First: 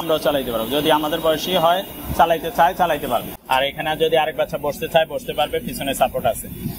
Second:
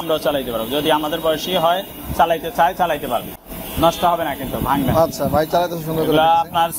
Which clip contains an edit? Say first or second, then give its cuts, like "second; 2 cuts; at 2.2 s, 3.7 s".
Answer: first; 1 cut; at 3.3 s